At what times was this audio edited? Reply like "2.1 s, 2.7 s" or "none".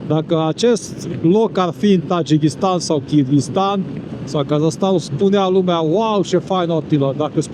none